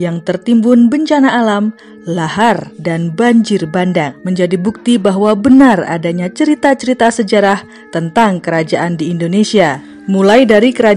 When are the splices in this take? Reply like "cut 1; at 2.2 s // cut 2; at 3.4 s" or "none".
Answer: cut 1; at 4.2 s